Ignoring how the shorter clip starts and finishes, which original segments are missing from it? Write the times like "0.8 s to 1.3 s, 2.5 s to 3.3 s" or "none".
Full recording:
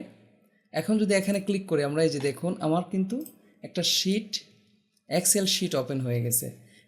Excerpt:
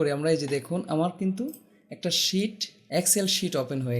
4.4 s to 4.9 s